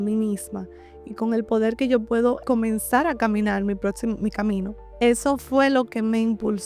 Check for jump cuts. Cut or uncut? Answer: cut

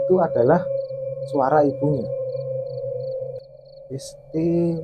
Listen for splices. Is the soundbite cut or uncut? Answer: cut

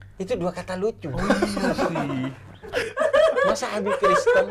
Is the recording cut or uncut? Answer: uncut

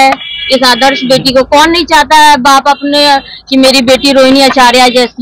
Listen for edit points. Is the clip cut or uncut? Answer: uncut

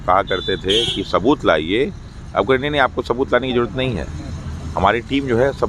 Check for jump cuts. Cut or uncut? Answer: uncut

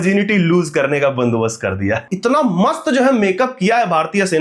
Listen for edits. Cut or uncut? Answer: cut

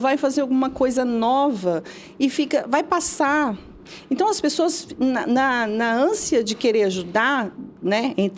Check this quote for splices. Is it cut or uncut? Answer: uncut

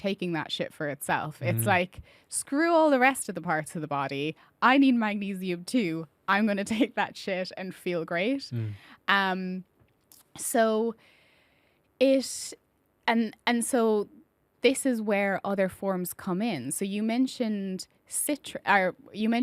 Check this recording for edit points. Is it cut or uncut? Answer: uncut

